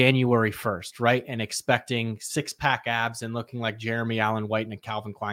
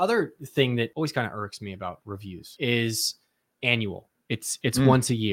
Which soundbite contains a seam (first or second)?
second